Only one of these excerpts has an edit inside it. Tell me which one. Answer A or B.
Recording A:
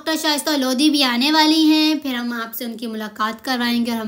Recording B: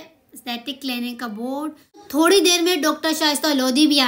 B